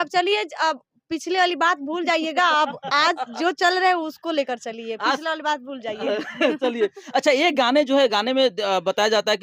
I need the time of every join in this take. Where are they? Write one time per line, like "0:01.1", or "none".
none